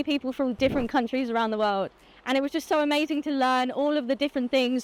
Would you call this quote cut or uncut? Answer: uncut